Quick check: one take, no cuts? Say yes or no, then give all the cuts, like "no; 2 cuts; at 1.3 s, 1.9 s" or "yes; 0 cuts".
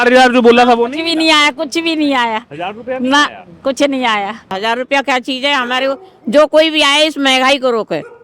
no; 1 cut; at 4.5 s